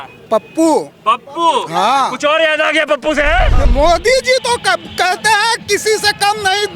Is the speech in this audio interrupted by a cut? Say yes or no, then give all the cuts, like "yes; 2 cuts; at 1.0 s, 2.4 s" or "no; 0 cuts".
yes; 1 cut; at 3.7 s